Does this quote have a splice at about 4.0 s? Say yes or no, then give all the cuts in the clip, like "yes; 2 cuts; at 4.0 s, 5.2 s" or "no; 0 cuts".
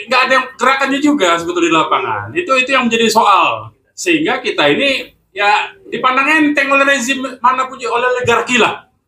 no; 0 cuts